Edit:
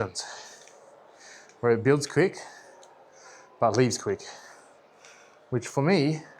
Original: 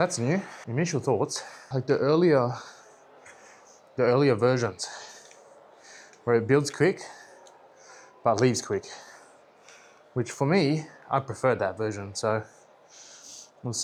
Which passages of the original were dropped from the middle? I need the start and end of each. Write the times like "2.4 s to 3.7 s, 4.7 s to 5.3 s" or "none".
none